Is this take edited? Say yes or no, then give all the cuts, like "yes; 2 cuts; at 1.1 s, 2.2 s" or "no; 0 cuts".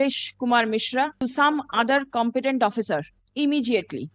yes; 2 cuts; at 1.1 s, 3.2 s